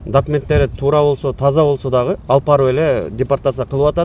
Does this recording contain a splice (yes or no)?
no